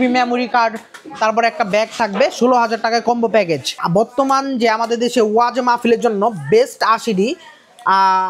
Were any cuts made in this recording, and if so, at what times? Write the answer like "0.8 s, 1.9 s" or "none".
3.8 s